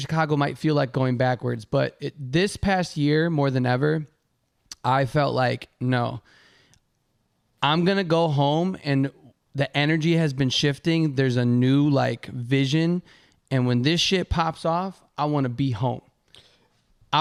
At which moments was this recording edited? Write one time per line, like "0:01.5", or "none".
none